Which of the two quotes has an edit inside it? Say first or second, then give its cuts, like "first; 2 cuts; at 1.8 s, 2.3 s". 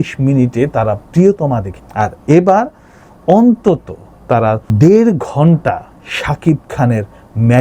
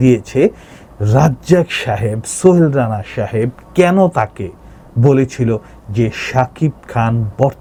first; 1 cut; at 1.8 s